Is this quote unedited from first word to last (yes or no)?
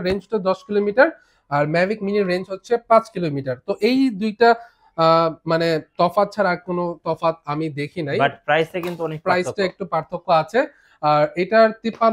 yes